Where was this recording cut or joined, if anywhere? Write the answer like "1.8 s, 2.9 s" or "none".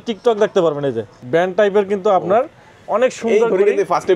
1.2 s

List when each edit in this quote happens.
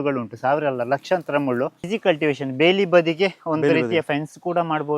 1.9 s

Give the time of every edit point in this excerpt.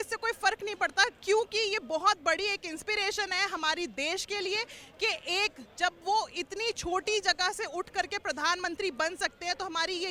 none

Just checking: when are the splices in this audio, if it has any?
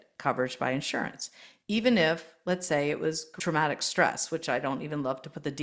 3.3 s

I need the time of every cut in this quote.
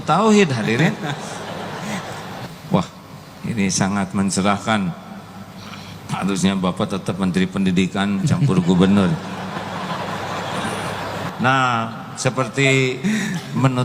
2.3 s, 11.3 s

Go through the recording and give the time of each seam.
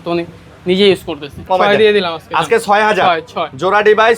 1.4 s

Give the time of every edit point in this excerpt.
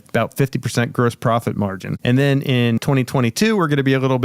1.9 s, 2.8 s

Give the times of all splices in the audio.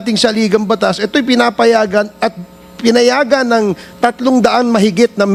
none

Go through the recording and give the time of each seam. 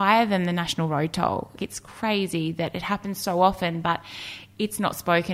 1.5 s

